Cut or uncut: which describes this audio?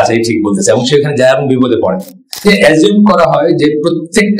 cut